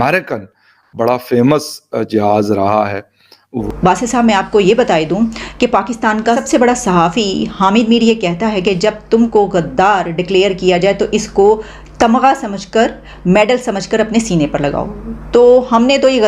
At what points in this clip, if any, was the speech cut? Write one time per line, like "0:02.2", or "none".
0:03.6